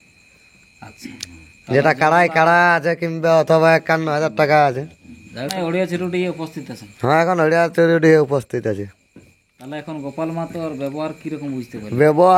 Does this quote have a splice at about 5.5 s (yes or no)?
yes